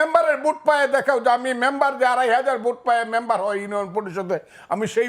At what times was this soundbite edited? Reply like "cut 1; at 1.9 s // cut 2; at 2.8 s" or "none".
none